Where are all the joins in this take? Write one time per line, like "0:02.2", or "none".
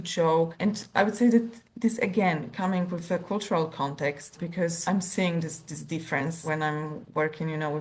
0:04.8
0:06.4